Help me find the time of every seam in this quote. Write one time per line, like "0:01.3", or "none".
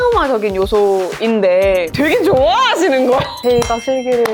0:01.9
0:03.3